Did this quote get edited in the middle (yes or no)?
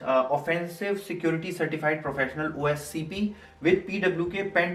no